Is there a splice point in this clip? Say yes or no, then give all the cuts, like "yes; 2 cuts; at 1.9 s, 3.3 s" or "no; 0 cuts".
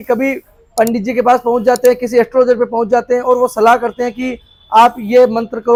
no; 0 cuts